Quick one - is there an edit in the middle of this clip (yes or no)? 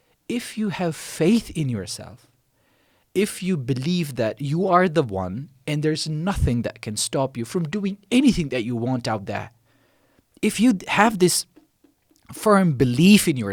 no